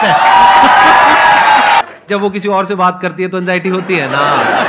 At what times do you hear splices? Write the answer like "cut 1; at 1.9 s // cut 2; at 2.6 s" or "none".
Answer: cut 1; at 1.8 s